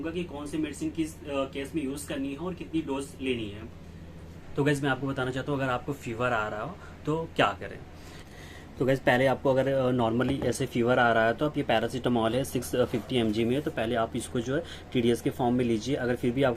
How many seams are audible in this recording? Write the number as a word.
zero